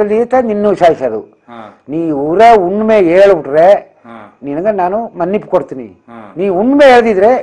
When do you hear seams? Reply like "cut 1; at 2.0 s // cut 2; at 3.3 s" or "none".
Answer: none